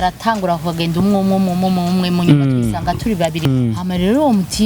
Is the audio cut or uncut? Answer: cut